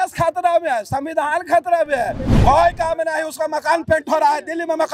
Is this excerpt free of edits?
no; 1 cut; at 2.3 s

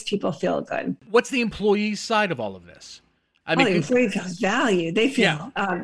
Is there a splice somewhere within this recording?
yes; 1 cut; at 1.0 s

